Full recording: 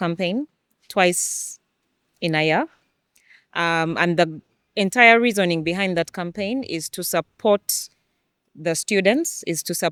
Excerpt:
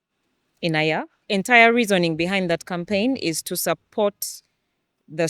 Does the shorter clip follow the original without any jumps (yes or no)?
no